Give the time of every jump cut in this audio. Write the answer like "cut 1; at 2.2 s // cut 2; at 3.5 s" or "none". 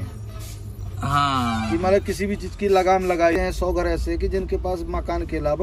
cut 1; at 3.4 s